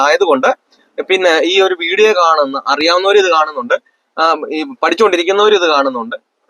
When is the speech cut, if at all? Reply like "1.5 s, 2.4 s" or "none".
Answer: none